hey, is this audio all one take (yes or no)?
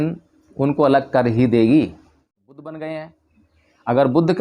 no